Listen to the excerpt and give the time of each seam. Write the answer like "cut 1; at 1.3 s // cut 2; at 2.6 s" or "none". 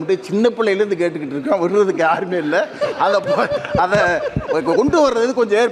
none

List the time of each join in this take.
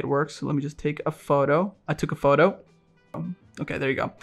cut 1; at 3.2 s

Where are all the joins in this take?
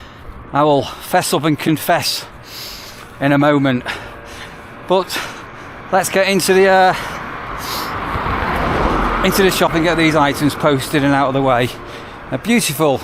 none

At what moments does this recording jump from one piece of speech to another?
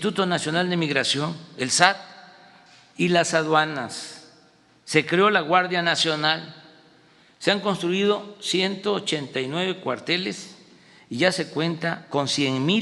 none

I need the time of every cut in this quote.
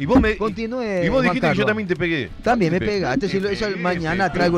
none

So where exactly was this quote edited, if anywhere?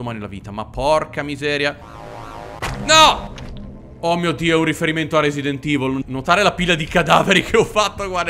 cut 1; at 1.9 s // cut 2; at 6.0 s

